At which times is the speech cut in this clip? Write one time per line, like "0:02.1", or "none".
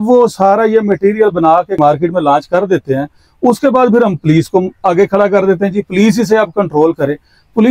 0:01.8